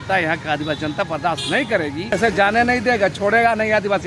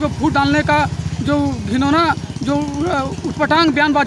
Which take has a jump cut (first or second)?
first